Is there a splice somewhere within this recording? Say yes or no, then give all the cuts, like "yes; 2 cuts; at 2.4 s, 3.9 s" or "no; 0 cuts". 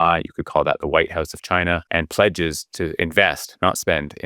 yes; 1 cut; at 1.9 s